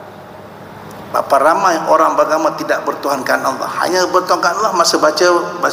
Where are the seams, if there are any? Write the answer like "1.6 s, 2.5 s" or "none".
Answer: none